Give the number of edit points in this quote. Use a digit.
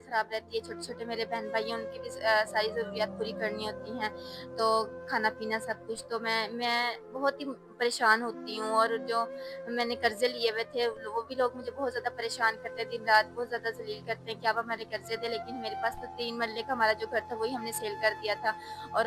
0